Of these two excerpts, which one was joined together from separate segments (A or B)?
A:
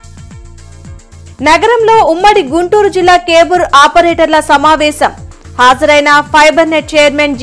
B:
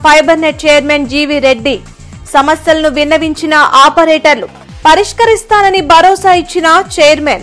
A